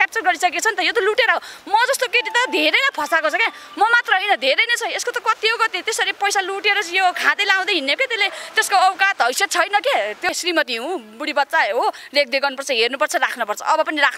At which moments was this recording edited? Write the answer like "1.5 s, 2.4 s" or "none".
10.2 s